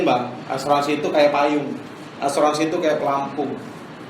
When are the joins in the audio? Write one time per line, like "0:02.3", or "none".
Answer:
0:02.0